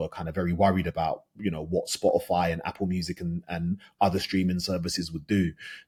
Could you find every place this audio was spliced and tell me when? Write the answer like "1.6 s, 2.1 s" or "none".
none